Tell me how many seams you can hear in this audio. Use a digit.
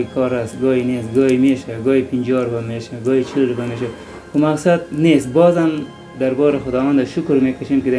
0